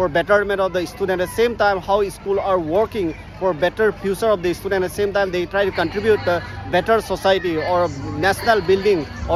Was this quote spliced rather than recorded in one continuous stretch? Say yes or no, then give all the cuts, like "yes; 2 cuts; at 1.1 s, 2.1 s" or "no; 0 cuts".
no; 0 cuts